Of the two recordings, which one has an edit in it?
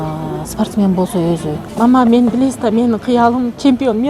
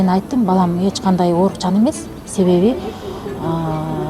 first; 1 cut; at 1.6 s

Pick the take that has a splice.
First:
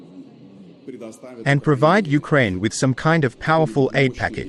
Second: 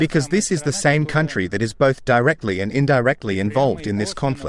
first; 1 cut; at 1.4 s

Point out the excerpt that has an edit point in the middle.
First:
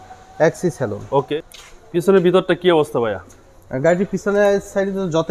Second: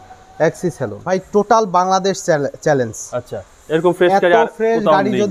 second; 1 cut; at 1.0 s

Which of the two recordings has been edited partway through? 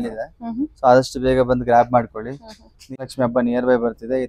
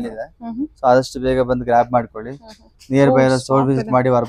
first; 1 cut; at 3.0 s

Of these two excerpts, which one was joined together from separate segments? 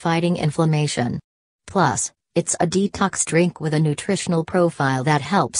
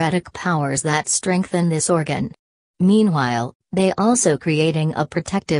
second; 1 cut; at 0.9 s

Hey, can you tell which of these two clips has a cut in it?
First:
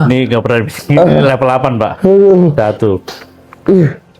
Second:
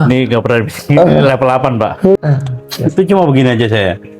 second; 1 cut; at 2.2 s

